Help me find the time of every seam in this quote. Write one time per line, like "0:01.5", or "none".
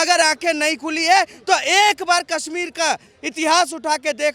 none

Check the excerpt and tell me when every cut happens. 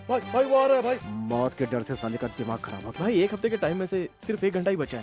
0:01.1
0:02.8

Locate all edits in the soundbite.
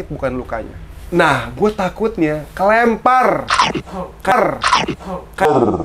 0:00.9

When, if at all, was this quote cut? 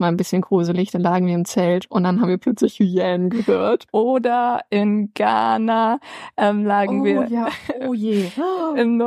0:03.8

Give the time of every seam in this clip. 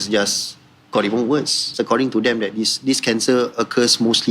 0:01.7

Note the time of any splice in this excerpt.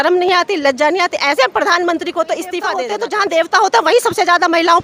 0:02.9

